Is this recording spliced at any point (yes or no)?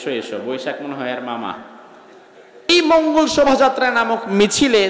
yes